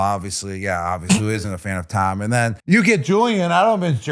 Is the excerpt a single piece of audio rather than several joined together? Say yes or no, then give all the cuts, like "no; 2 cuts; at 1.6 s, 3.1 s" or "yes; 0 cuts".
no; 1 cut; at 2.6 s